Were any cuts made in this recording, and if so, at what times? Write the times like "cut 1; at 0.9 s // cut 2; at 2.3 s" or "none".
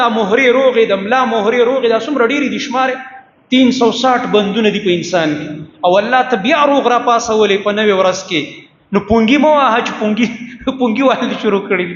none

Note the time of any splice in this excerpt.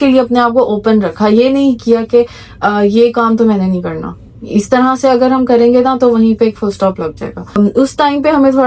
cut 1; at 7.5 s

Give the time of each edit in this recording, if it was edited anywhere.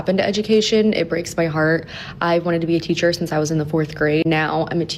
none

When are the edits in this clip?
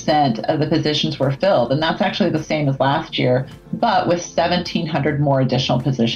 none

